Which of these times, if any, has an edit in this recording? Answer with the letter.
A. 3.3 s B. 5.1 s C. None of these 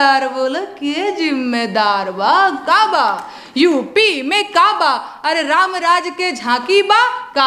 C